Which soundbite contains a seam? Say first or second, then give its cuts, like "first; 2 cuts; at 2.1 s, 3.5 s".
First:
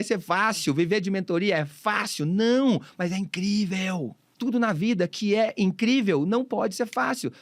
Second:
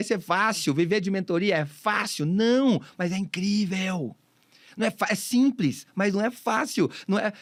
first; 1 cut; at 4.3 s